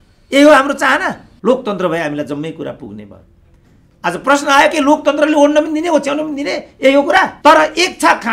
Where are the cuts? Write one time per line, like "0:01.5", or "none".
0:01.3
0:07.3